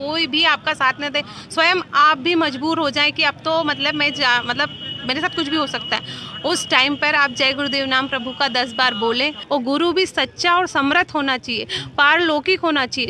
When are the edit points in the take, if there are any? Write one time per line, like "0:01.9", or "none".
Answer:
0:09.4